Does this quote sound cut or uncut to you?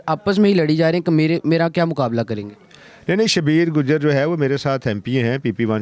uncut